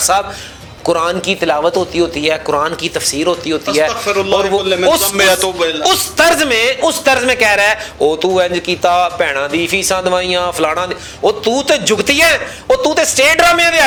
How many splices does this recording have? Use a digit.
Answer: 0